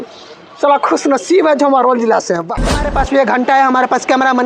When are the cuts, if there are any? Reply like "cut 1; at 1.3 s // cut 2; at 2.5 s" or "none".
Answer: cut 1; at 2.9 s